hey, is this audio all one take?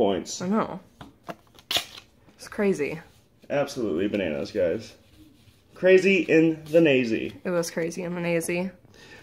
no; 1 cut; at 5.8 s

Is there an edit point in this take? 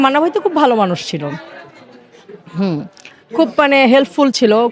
no; 0 cuts

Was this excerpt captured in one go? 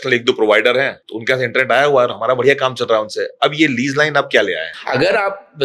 no; 2 cuts; at 0.9 s, 4.7 s

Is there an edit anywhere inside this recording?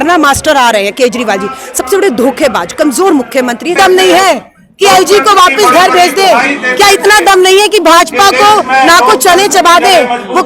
yes; 1 cut; at 3.8 s

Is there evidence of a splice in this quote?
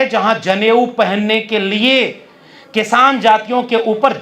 no; 0 cuts

